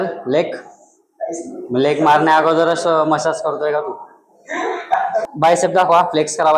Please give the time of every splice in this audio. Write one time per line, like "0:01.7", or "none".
0:05.2